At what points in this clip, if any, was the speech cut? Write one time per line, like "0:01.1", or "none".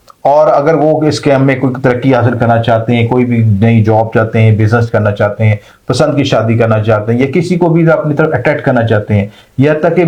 none